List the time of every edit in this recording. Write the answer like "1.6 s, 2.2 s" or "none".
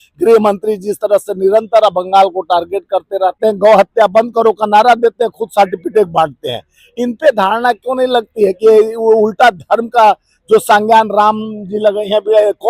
3.4 s